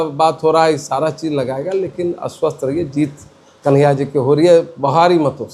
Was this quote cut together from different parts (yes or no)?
no